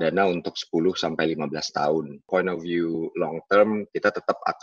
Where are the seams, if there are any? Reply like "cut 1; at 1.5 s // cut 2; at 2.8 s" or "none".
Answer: cut 1; at 2.3 s